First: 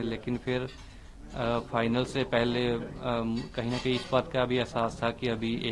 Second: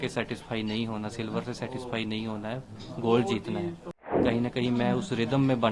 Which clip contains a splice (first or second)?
second